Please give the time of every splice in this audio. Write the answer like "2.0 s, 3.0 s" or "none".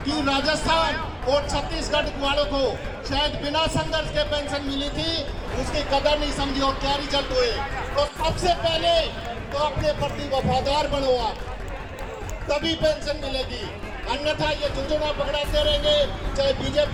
none